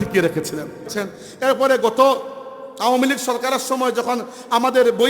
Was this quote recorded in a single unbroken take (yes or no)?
no